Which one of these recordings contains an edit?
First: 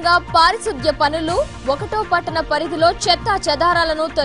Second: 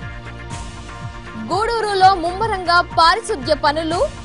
second; 1 cut; at 1.1 s

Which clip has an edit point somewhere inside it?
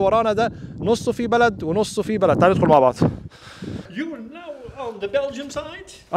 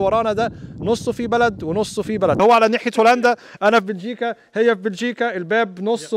second; 1 cut; at 2.4 s

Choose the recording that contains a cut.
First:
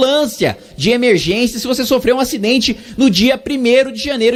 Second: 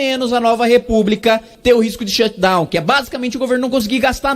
second; 1 cut; at 1.5 s

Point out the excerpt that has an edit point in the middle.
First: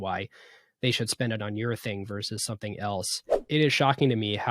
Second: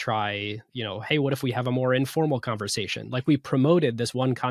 first; 1 cut; at 3.3 s

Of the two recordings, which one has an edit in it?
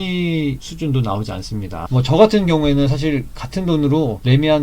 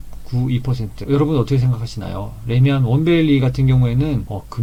first; 1 cut; at 1.9 s

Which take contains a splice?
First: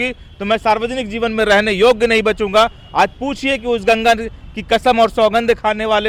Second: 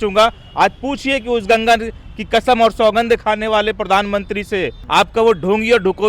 second; 1 cut; at 4.8 s

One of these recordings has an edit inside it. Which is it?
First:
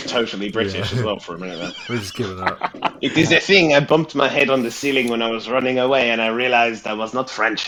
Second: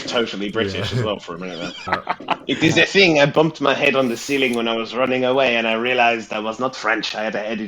second; 1 cut; at 1.8 s

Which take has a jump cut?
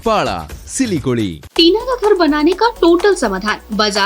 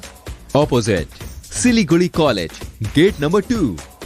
first; 1 cut; at 1.4 s

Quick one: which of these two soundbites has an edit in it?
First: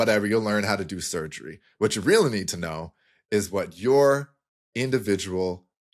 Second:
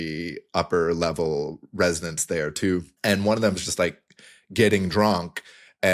second; 1 cut; at 2.9 s

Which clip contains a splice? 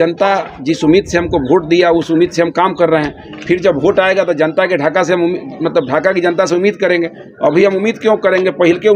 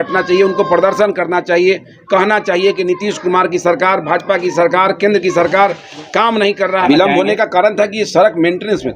second; 1 cut; at 6.9 s

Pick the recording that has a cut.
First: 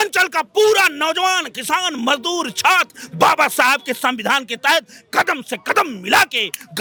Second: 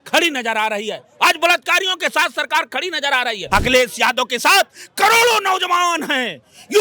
second; 1 cut; at 3.4 s

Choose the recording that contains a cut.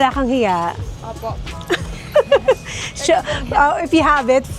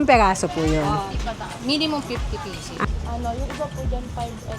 second; 1 cut; at 2.8 s

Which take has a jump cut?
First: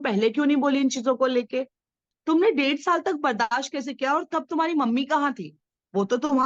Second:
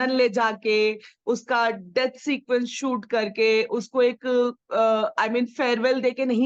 first; 1 cut; at 2.1 s

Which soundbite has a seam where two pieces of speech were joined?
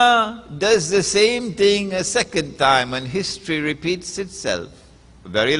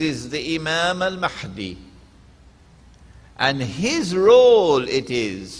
first; 1 cut; at 2.0 s

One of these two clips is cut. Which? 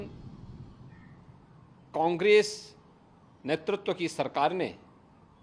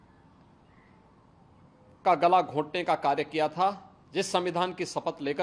second; 1 cut; at 3.9 s

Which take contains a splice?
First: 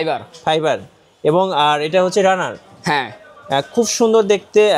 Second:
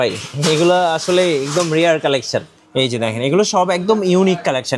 second; 1 cut; at 2.5 s

